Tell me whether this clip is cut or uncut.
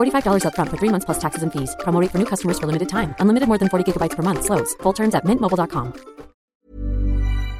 cut